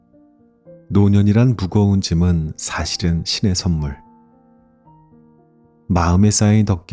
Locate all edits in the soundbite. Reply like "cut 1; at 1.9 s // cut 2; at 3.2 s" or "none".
cut 1; at 4.0 s // cut 2; at 5.4 s